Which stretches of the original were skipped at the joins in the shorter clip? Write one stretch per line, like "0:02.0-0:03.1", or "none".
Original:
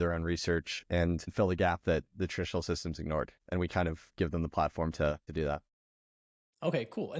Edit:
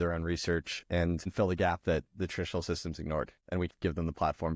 0:03.6-0:04.0